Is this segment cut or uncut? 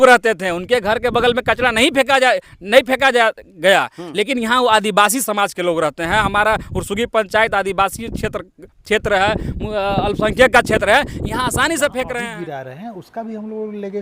cut